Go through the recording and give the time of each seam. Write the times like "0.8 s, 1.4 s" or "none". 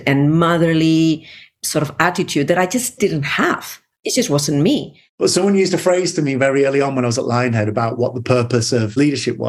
5.0 s

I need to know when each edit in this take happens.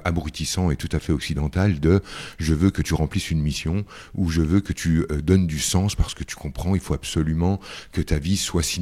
none

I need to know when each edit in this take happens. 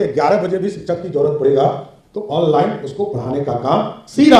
none

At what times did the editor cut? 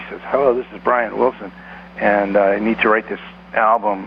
none

